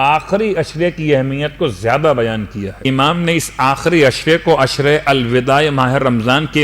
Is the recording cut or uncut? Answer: cut